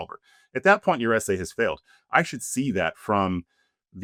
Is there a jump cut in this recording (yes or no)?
no